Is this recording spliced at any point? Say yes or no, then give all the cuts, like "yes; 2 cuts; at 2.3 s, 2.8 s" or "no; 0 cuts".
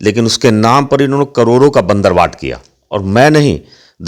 no; 0 cuts